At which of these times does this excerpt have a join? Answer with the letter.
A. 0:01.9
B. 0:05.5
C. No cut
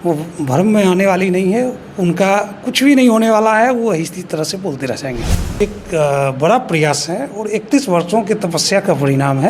B